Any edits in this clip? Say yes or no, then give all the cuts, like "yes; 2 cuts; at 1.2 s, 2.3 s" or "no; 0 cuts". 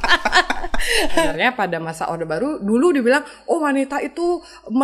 yes; 1 cut; at 1.3 s